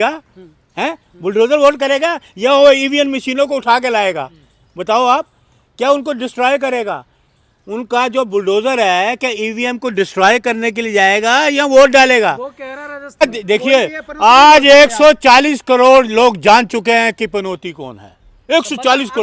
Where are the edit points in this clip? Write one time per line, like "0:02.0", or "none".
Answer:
0:13.2